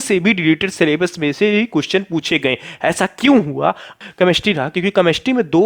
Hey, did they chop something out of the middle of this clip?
yes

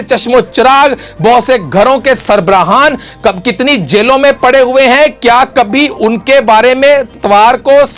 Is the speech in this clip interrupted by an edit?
no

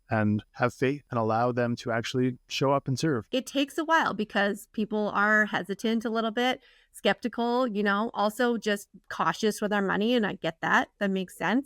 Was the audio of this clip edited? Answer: yes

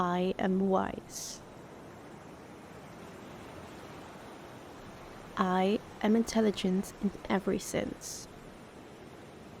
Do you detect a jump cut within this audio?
yes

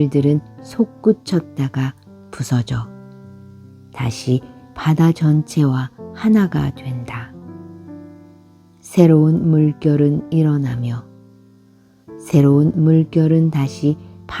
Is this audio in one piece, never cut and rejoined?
yes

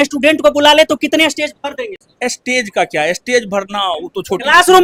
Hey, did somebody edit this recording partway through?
no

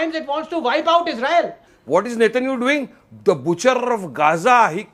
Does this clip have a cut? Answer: yes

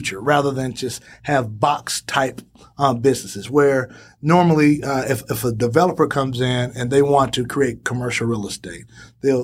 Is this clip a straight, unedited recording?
yes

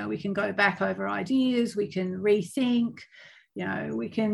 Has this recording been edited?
no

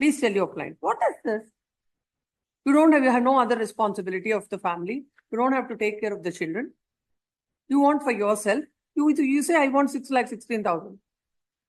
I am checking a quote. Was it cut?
no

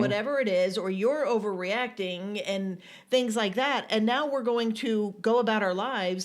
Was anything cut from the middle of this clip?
no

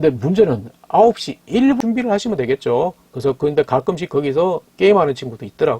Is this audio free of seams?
no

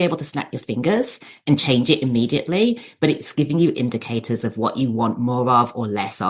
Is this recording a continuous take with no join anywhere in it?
no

